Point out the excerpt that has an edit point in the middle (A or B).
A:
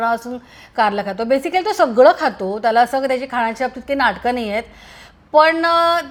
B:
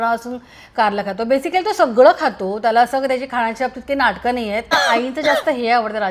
B